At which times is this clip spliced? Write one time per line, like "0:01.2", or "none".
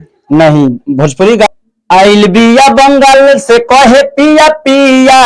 0:01.5